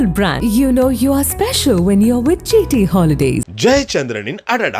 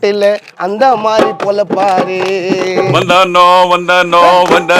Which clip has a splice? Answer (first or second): second